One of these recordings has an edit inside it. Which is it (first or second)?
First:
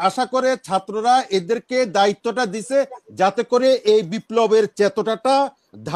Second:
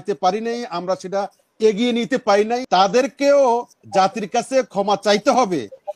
second